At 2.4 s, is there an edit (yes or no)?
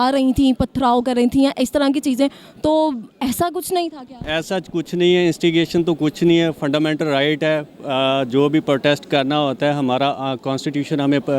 no